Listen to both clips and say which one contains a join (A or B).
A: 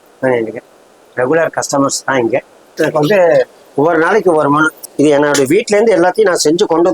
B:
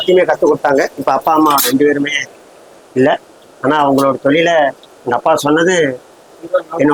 A